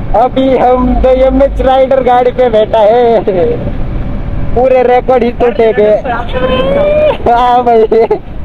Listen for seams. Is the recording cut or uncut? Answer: uncut